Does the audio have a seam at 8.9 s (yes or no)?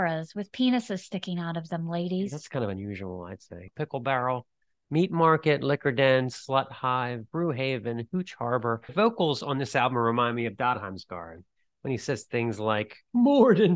yes